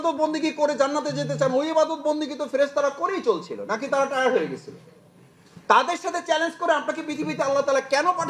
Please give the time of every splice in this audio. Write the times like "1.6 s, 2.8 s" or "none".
none